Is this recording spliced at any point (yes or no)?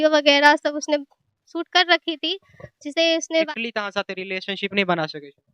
yes